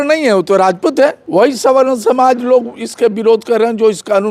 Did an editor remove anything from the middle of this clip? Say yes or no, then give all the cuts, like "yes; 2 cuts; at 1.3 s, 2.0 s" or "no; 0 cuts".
yes; 1 cut; at 1.2 s